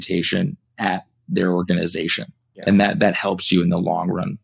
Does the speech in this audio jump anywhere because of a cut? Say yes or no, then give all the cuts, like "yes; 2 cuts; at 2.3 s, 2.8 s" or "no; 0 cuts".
no; 0 cuts